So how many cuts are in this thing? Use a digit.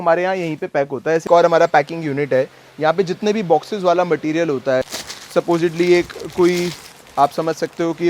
2